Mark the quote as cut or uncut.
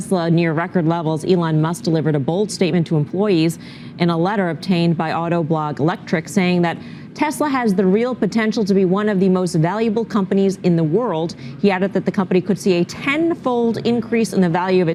uncut